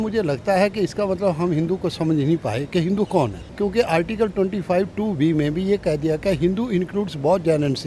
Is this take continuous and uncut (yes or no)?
no